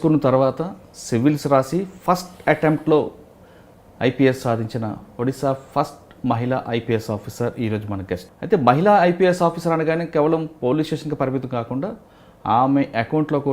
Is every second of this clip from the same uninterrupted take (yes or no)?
no